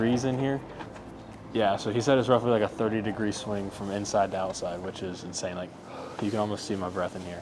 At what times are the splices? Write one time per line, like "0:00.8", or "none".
none